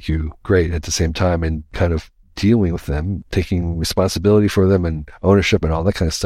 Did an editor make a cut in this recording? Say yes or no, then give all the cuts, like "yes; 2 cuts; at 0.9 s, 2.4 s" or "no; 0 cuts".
yes; 2 cuts; at 1.7 s, 3.2 s